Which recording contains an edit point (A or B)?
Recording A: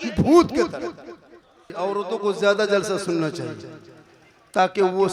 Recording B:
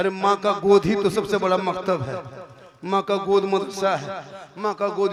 A